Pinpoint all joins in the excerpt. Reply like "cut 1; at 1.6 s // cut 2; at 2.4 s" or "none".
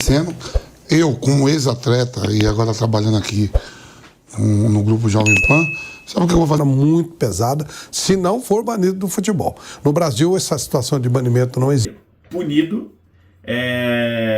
cut 1; at 6.6 s // cut 2; at 11.8 s